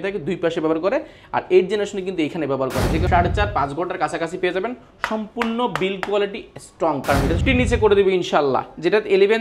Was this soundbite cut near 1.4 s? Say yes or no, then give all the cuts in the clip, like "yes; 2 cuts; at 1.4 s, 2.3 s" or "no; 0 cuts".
no; 2 cuts; at 3.0 s, 7.4 s